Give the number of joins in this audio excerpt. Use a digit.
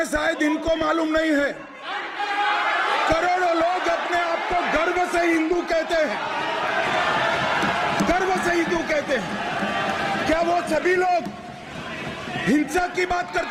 0